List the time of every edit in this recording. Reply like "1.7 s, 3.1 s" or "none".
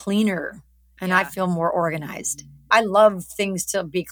2.7 s